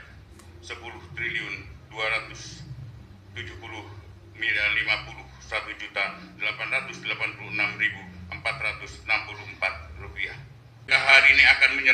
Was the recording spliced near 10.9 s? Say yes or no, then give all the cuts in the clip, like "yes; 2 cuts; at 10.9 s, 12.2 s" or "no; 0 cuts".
yes; 1 cut; at 10.9 s